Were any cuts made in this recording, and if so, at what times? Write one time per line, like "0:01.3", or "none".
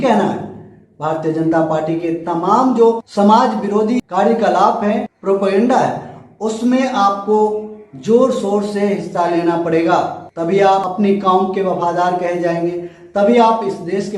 0:04.1
0:10.9